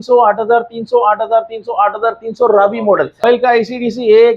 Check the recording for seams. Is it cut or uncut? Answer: cut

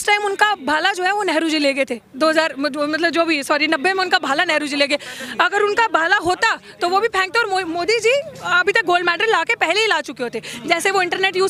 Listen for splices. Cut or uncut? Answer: uncut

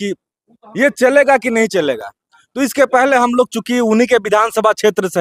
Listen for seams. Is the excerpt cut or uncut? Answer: uncut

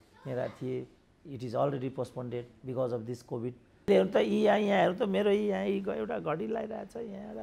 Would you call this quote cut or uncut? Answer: cut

